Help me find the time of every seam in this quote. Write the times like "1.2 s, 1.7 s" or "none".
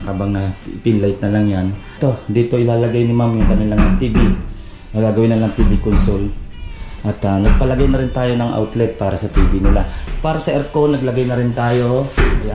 2.0 s, 10.1 s